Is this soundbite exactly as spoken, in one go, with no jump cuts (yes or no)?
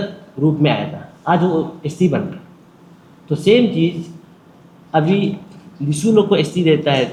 yes